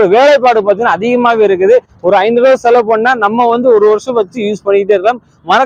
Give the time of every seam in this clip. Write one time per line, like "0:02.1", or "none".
none